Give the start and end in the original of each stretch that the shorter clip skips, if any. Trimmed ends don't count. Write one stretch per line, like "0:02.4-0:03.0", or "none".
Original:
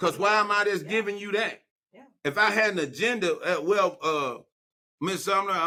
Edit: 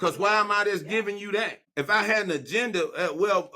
0:01.6-0:02.1

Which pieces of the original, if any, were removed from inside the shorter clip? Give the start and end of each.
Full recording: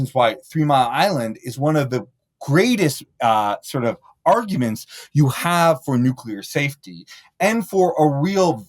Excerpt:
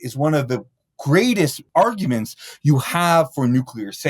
0:03.0-0:04.1

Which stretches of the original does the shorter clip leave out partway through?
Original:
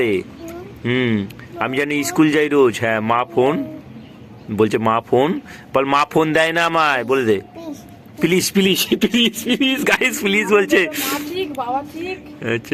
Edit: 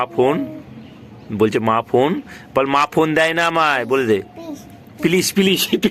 none

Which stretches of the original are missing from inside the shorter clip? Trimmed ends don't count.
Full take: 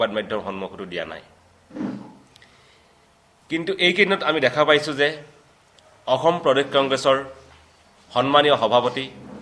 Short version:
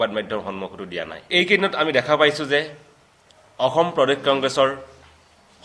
0:01.3-0:03.8

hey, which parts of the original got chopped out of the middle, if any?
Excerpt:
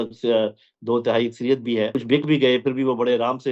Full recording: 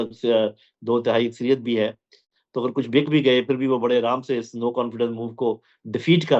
0:01.9-0:02.7

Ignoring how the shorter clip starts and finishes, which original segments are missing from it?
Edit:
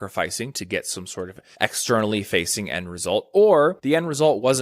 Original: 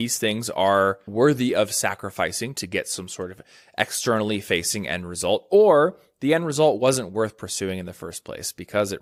0:03.4-0:03.6
0:06.0-0:06.2

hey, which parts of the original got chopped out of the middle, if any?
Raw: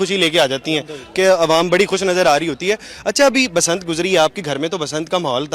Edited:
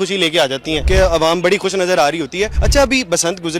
0:00.8-0:01.1
0:02.9-0:03.0

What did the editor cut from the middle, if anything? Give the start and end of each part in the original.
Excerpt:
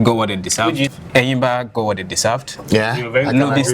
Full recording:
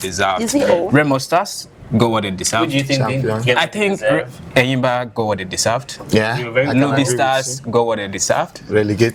0:02.9-0:04.3

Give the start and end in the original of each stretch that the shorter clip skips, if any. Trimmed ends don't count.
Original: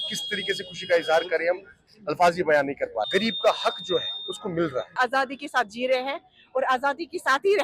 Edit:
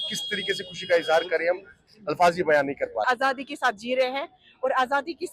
0:03.0-0:05.0

